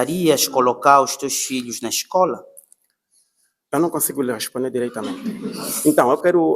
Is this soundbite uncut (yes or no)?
no